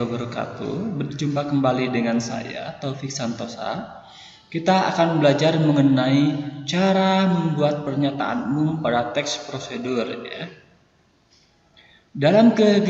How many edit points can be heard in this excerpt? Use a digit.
1